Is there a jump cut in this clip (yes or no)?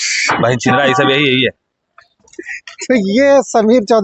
no